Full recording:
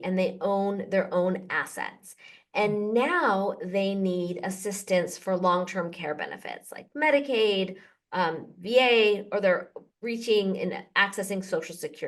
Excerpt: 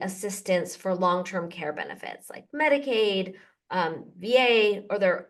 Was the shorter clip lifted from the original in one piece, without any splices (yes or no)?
yes